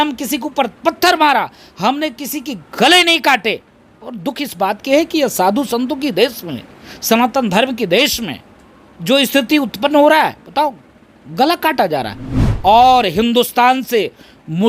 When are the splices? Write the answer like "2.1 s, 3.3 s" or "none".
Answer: 12.5 s